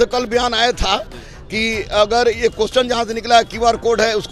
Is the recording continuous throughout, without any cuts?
yes; 0 cuts

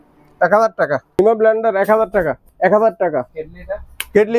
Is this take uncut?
no; 3 cuts; at 1.2 s, 2.4 s, 3.3 s

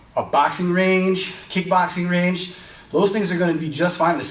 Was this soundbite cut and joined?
no; 0 cuts

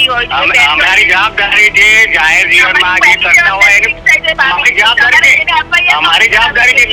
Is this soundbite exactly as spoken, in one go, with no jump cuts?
yes; 0 cuts

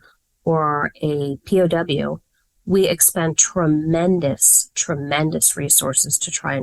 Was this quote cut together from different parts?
no; 0 cuts

